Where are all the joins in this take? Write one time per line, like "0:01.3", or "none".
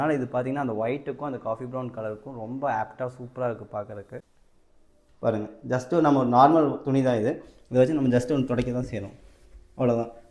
0:04.4